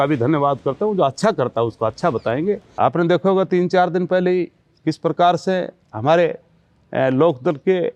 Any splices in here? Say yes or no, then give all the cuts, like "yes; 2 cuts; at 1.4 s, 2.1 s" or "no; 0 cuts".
yes; 1 cut; at 2.7 s